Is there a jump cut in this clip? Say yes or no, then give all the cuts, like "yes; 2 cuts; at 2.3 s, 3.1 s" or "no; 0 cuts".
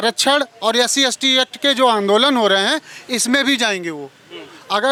no; 0 cuts